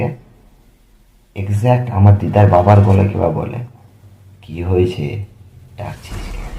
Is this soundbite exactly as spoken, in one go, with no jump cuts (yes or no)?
yes